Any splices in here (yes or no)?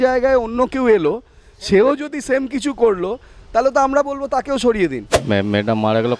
yes